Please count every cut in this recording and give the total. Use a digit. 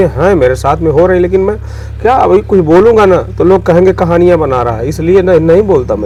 0